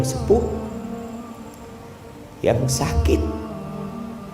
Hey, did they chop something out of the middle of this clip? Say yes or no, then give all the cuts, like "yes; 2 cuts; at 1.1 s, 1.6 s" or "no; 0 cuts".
yes; 1 cut; at 3.4 s